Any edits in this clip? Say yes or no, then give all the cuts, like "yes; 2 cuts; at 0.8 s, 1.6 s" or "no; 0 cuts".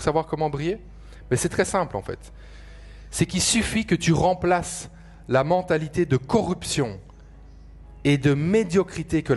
no; 0 cuts